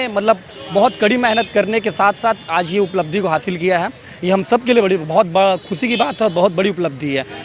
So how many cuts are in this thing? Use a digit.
0